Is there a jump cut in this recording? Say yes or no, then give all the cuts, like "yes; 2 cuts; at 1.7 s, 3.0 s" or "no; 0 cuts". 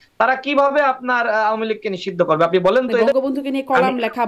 yes; 1 cut; at 3.1 s